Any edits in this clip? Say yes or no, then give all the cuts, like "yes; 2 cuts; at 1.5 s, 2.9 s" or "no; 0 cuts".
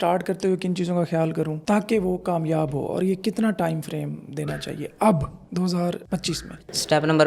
no; 0 cuts